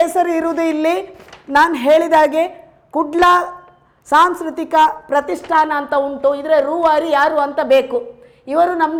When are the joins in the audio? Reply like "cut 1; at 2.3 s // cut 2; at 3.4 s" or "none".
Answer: none